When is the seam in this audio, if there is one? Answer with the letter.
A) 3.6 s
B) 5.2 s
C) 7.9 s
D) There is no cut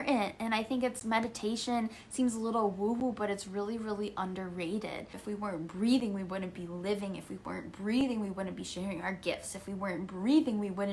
B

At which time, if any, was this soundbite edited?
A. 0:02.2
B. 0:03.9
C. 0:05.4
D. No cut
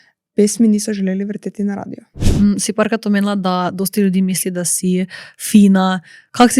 A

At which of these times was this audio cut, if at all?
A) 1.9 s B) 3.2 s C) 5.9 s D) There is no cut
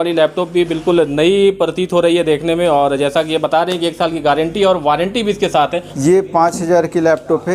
C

